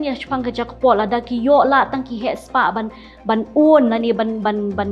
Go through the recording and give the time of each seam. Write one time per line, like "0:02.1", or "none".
none